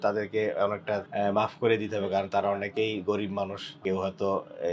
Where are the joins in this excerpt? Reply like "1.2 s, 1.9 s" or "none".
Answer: 1.1 s, 3.7 s